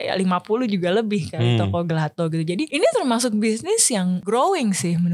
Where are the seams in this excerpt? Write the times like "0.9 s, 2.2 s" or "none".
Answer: 2.7 s, 4.2 s